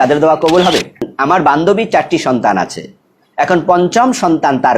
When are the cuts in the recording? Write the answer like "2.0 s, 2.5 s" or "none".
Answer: 1.0 s